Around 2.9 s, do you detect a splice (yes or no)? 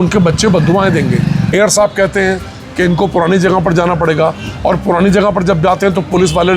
no